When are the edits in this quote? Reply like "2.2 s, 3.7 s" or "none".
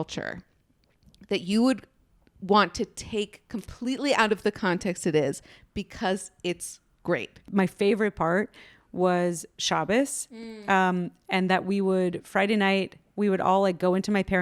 7.4 s